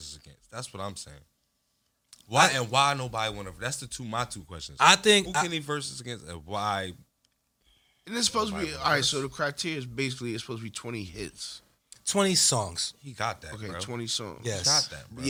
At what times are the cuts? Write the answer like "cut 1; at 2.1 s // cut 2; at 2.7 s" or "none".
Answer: none